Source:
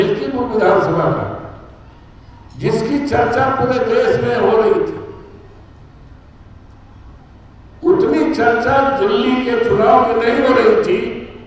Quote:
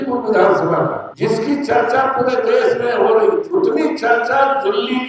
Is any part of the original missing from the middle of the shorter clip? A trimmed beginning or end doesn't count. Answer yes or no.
yes